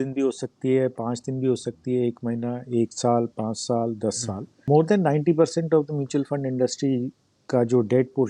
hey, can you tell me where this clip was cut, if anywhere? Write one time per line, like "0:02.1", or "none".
0:04.7